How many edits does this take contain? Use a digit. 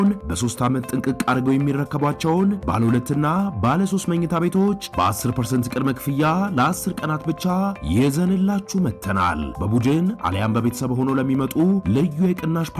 0